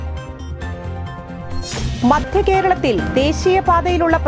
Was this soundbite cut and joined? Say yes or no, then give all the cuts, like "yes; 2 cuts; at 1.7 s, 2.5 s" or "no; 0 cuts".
yes; 1 cut; at 1.7 s